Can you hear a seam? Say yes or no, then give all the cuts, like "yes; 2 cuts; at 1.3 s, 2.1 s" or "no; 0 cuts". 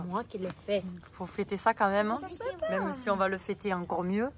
no; 0 cuts